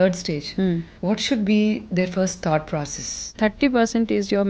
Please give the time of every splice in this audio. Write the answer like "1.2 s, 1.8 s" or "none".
0.9 s, 3.3 s